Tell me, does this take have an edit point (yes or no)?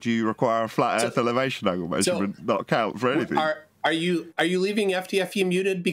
no